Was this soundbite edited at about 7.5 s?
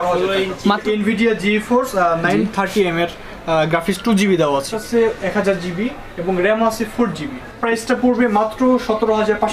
yes; 3 cuts; at 0.8 s, 4.7 s, 7.5 s

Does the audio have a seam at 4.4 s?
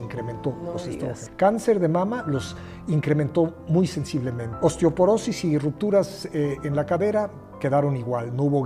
yes; 2 cuts; at 1.2 s, 4.4 s

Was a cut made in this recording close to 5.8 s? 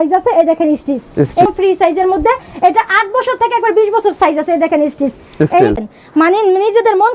yes; 2 cuts; at 1.5 s, 5.8 s

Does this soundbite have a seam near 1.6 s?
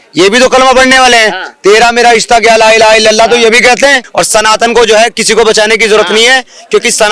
no; 1 cut; at 4.0 s

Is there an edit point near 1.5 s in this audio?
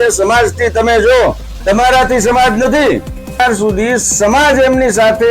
no; 1 cut; at 3.4 s

